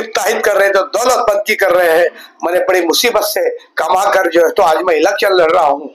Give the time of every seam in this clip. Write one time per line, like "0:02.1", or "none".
none